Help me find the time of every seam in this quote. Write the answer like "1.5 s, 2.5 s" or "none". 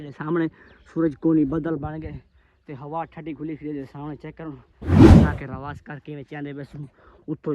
4.7 s, 5.3 s